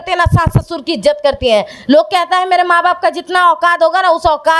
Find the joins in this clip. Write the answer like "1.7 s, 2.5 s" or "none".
none